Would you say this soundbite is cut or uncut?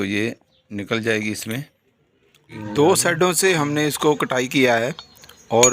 cut